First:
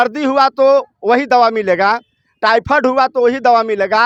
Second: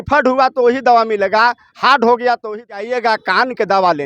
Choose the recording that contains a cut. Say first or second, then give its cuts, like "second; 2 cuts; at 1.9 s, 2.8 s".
second; 1 cut; at 2.6 s